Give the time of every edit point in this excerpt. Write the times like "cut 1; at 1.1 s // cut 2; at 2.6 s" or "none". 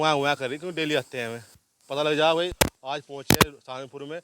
cut 1; at 2.6 s